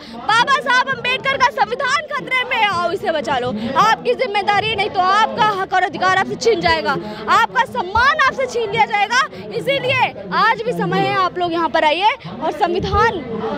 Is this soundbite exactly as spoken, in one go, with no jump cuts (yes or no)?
yes